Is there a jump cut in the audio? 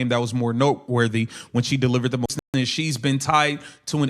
yes; 1 cut; at 2.4 s

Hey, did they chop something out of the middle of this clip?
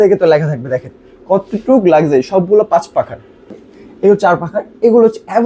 yes; 1 cut; at 3.5 s

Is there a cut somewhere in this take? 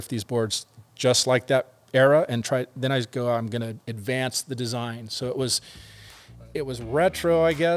no; 0 cuts

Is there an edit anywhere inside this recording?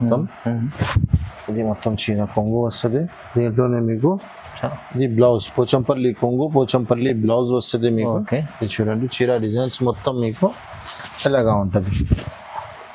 no; 0 cuts

